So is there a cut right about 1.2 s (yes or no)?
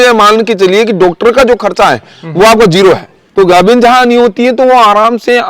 no